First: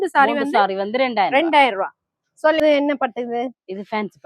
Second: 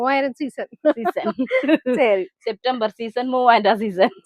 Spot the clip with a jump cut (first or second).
first